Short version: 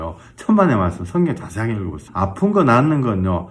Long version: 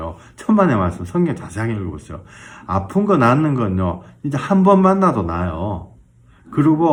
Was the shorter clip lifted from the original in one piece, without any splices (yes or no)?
no